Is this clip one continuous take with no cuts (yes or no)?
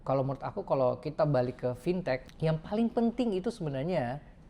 no